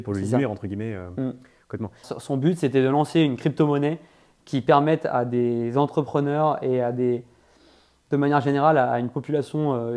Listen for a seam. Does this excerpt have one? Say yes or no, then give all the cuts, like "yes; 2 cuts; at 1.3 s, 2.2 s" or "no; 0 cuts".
yes; 1 cut; at 2.1 s